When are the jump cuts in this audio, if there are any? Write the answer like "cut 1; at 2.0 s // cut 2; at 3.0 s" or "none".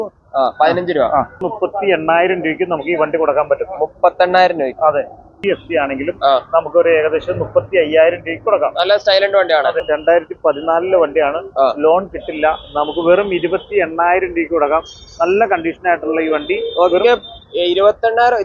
cut 1; at 1.4 s // cut 2; at 5.4 s // cut 3; at 9.8 s

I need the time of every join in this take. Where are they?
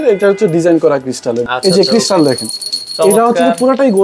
cut 1; at 1.4 s

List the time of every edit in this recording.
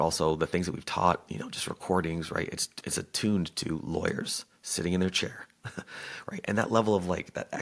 none

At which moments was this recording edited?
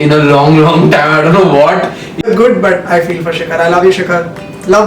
cut 1; at 2.2 s

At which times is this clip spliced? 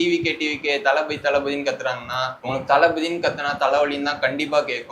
cut 1; at 2.4 s

